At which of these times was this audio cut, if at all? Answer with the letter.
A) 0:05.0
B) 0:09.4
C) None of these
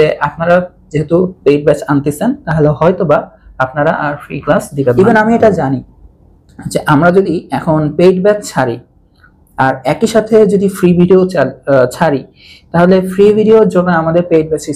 A